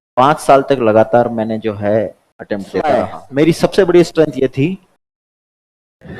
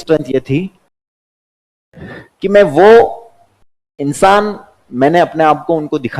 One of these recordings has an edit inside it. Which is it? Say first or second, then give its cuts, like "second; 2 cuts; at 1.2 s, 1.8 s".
first; 1 cut; at 3.2 s